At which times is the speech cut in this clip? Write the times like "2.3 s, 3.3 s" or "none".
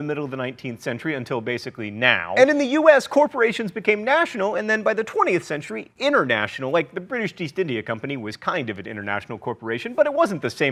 none